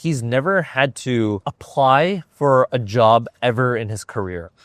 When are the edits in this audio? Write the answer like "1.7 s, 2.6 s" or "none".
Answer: 1.5 s